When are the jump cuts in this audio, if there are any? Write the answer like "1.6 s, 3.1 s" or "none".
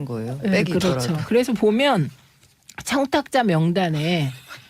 2.1 s